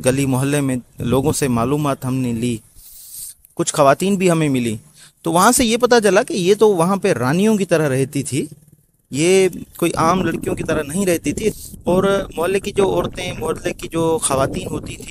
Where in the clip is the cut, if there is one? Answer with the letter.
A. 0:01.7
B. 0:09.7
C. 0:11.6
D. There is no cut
C